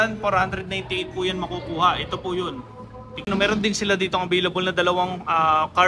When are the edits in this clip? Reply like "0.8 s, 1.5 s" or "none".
3.3 s

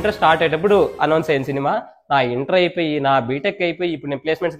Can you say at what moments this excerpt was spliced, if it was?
none

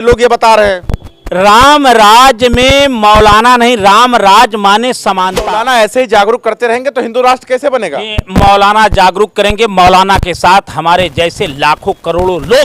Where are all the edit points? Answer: 5.4 s

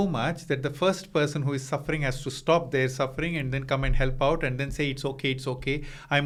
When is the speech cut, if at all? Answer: none

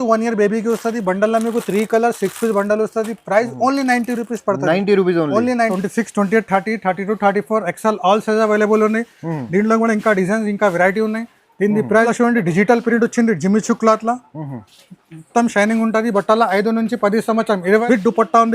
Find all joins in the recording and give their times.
5.7 s, 12.1 s, 17.8 s

